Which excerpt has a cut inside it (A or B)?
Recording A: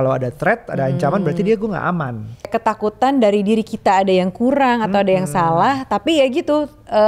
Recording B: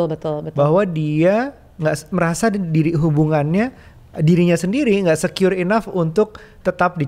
A